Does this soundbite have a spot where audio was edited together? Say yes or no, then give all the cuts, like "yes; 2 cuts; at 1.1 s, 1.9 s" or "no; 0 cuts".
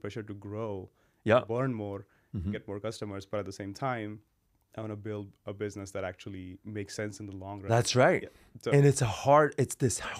no; 0 cuts